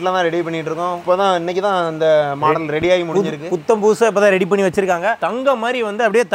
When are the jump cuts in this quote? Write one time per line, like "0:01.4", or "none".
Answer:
none